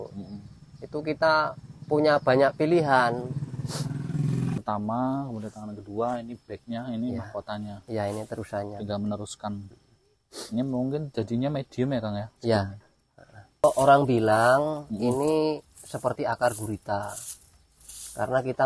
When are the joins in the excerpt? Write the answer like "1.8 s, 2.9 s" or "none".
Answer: 4.6 s, 13.6 s